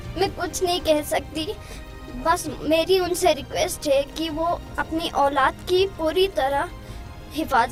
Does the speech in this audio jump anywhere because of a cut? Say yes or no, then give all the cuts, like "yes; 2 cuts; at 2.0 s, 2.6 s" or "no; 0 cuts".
no; 0 cuts